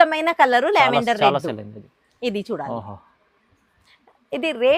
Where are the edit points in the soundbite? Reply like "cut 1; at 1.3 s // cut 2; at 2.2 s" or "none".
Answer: none